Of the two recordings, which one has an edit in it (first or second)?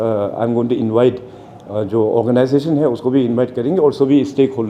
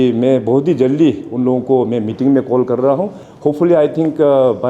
second